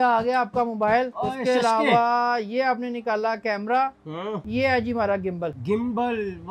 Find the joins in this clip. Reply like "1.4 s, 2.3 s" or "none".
1.2 s, 4.4 s, 5.6 s